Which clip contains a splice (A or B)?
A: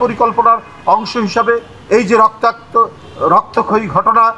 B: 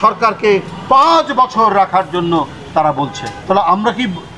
B